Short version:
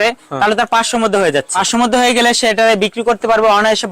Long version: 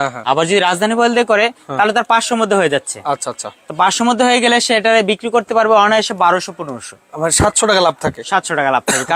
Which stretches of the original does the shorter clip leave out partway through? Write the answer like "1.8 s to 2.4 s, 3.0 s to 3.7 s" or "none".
2.9 s to 3.8 s